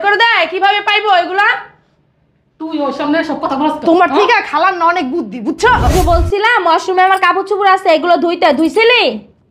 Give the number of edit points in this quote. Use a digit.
1